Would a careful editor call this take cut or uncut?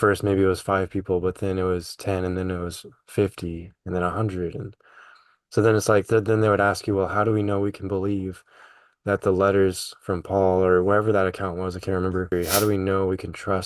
cut